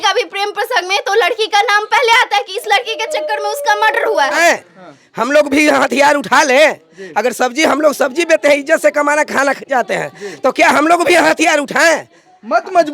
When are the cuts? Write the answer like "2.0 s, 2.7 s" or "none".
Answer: 4.4 s